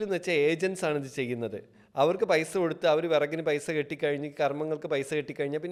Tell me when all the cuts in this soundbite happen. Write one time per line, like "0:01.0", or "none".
none